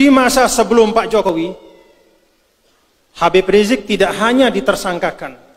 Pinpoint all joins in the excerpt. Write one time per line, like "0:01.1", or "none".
0:01.3